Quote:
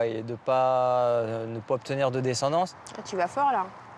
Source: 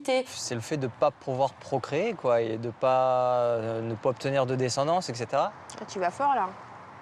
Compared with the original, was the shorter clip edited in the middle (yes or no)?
yes